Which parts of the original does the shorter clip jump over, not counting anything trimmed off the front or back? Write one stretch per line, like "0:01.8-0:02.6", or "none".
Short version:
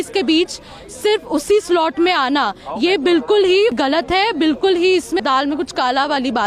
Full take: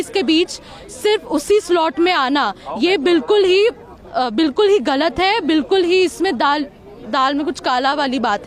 0:03.8-0:04.8
0:06.3-0:07.1

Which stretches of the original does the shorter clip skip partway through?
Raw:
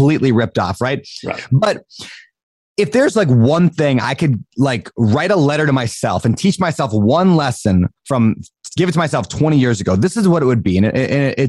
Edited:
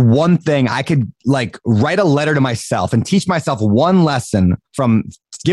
none

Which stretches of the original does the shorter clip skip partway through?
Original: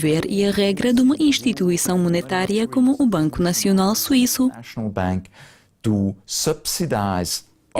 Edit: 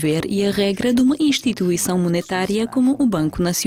none

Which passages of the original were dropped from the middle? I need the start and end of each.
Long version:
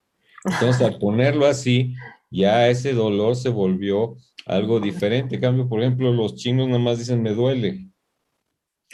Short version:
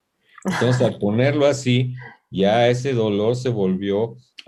none

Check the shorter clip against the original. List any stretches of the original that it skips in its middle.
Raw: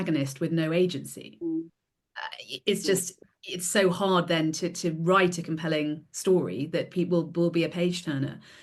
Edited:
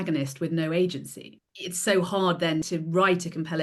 0:01.3-0:03.2
0:04.5-0:04.8

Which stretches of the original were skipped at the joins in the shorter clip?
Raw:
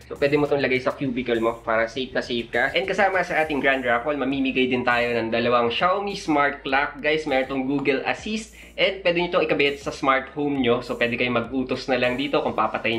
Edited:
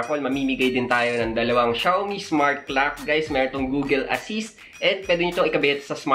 none

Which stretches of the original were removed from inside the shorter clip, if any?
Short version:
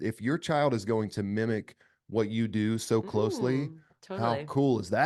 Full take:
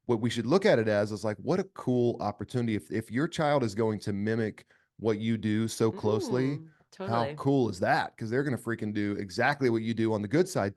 none

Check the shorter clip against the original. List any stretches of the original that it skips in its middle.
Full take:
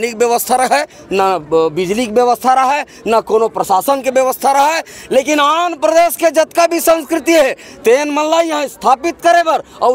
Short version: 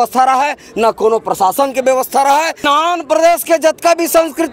0:04.9-0:05.4

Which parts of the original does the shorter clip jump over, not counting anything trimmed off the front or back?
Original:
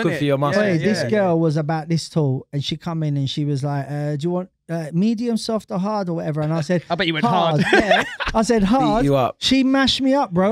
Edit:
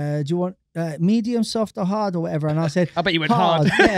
none

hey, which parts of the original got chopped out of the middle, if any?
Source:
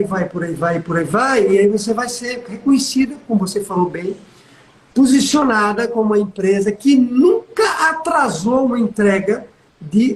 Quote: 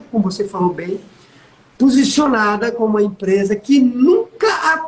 none

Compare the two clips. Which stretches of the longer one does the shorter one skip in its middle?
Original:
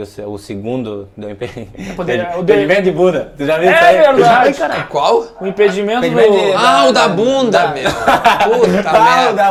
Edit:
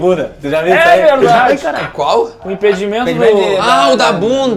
none

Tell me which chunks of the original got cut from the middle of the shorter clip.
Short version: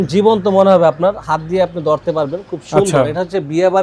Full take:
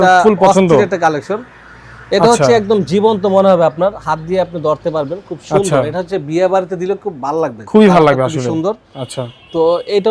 none

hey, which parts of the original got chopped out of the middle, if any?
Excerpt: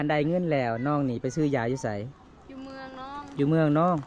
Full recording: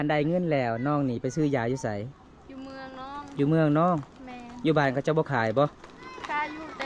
none

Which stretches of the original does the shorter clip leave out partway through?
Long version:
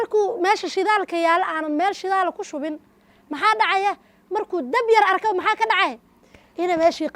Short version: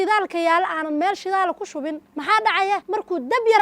0:02.9-0:03.2
0:04.0-0:04.3

